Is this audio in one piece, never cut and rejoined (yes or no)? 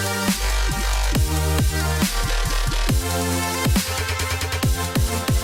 yes